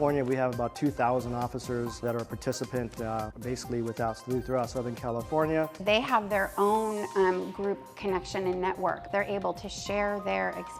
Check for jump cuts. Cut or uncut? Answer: cut